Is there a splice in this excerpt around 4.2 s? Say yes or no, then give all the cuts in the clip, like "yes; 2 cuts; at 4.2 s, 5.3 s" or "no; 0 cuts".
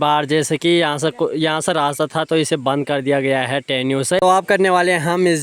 yes; 1 cut; at 4.2 s